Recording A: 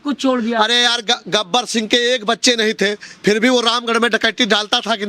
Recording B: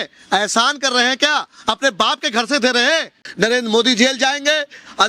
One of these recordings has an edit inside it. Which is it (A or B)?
B